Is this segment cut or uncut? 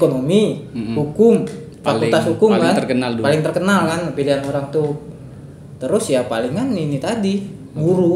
uncut